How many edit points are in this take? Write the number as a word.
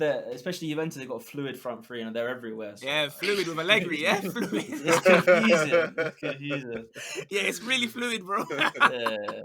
zero